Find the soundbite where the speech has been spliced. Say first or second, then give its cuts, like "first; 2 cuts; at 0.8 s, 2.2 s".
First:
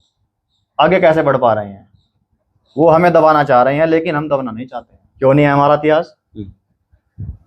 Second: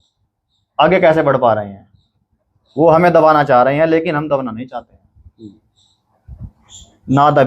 first; 1 cut; at 5.1 s